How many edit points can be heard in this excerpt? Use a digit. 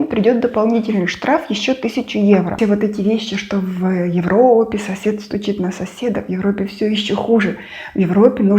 1